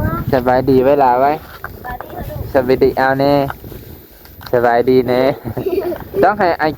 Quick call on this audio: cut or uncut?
uncut